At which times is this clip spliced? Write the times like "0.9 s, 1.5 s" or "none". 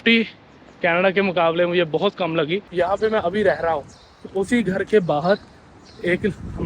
2.6 s